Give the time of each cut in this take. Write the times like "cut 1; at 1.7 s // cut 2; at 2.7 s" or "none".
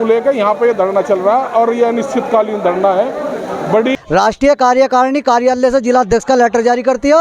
cut 1; at 3.9 s